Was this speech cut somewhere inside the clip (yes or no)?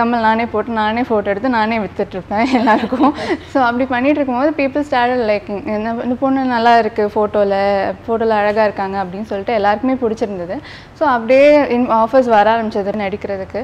no